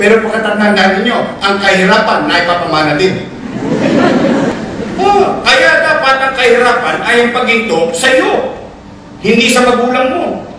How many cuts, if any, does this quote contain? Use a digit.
1